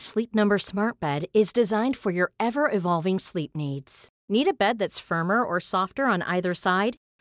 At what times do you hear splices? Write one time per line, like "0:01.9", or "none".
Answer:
none